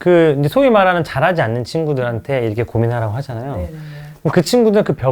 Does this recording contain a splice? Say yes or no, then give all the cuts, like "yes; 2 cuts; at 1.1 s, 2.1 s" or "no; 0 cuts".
no; 0 cuts